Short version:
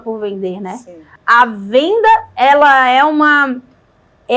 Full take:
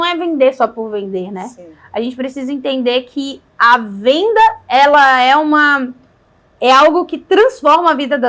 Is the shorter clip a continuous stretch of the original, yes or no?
no